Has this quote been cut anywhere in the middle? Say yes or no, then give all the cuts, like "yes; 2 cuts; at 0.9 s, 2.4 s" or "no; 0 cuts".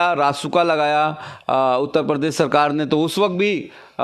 no; 0 cuts